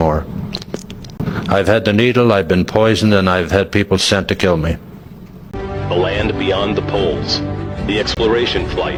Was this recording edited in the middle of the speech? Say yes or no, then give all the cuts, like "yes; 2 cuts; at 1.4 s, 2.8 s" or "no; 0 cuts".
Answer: no; 0 cuts